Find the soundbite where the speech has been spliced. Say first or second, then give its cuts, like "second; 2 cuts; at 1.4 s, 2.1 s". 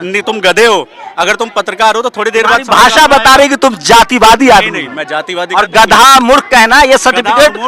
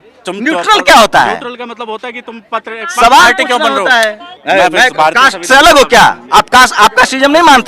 second; 1 cut; at 4.3 s